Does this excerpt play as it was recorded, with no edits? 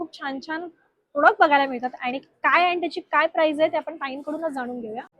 yes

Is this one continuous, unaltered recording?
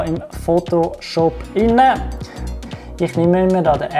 no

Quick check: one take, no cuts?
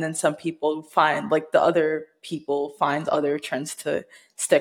yes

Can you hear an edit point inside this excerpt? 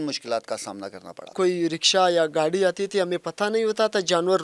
yes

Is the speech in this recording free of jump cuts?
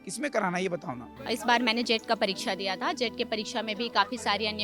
no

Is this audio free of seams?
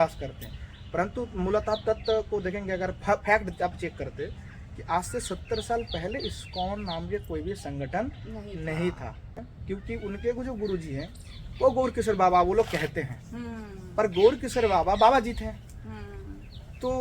no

